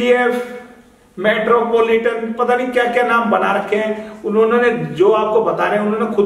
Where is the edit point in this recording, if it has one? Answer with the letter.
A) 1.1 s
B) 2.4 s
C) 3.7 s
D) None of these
D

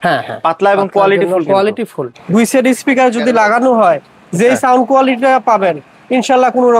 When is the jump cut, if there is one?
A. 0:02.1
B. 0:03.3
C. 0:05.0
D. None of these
A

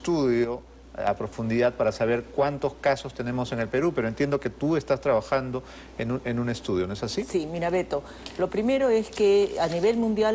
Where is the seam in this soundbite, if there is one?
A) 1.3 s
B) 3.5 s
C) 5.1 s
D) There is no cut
A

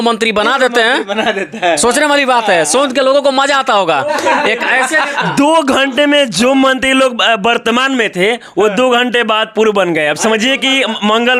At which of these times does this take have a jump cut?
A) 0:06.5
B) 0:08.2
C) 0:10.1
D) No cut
D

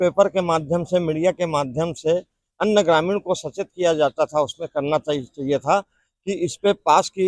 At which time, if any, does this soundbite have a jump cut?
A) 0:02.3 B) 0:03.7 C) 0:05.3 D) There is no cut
D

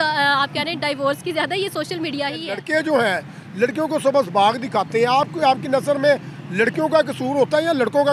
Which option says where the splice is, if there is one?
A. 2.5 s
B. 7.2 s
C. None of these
A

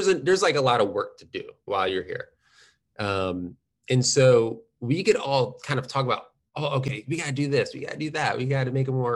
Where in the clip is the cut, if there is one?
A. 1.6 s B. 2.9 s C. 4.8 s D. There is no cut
A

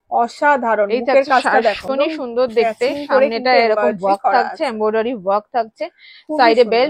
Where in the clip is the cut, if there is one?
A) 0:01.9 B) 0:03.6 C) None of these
A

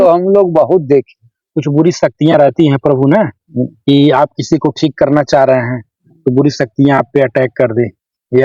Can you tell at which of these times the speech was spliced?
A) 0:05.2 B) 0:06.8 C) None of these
C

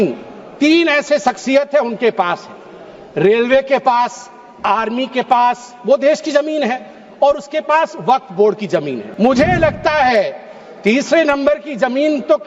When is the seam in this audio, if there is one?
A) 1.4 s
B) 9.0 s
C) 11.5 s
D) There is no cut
B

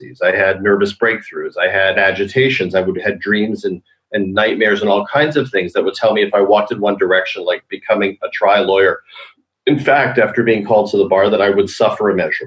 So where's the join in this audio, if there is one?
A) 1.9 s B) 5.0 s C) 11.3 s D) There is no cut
A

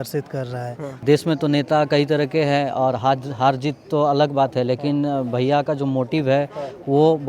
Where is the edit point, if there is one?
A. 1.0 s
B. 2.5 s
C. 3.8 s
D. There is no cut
A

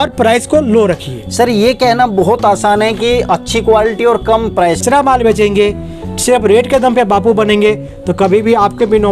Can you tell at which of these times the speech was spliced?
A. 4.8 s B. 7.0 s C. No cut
A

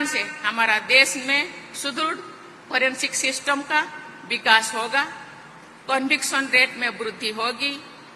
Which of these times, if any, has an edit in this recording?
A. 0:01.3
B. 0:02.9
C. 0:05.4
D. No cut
D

